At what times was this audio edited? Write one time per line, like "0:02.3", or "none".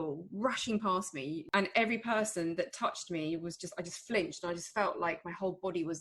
0:01.4